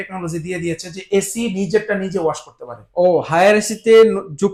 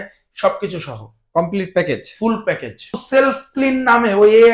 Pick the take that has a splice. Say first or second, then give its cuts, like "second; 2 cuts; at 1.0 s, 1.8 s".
second; 1 cut; at 3.0 s